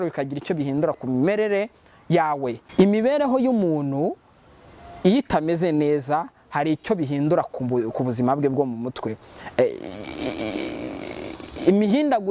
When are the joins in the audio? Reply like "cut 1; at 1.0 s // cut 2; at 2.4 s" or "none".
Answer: cut 1; at 2.6 s